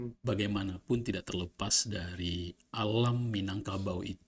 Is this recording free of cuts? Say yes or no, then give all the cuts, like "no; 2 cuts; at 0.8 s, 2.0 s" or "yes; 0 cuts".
yes; 0 cuts